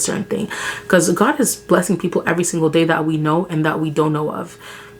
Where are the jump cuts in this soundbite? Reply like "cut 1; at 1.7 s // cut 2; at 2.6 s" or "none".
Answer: none